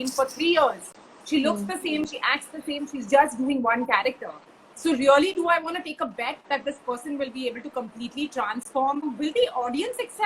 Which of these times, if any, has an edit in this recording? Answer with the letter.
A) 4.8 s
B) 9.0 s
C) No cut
B